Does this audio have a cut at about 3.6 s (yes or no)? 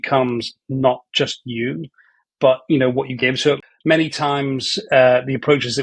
yes